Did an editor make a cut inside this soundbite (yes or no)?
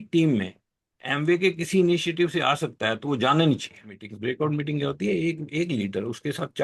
yes